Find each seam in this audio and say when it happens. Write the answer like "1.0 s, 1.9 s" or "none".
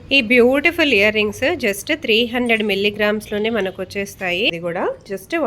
4.5 s